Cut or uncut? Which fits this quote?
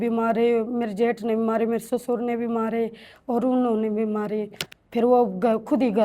uncut